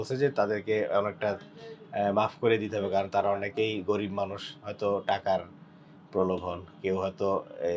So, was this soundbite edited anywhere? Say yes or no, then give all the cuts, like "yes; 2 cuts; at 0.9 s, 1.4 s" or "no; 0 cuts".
no; 0 cuts